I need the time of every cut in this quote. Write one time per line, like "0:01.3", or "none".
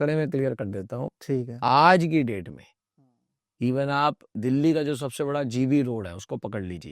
none